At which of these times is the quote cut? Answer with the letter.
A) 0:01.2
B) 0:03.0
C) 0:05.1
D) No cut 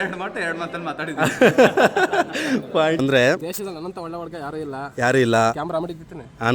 B